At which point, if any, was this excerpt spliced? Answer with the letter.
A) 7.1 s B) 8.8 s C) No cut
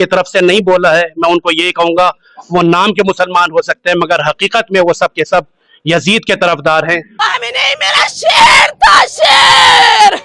A